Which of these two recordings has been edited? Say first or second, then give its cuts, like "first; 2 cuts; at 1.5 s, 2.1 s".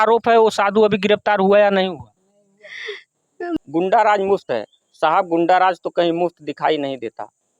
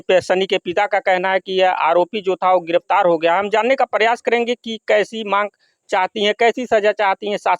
first; 1 cut; at 3.5 s